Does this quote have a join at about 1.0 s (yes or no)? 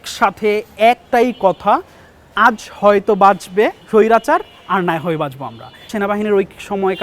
yes